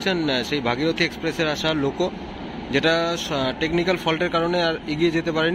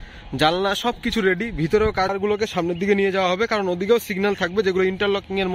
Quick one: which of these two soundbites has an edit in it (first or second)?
second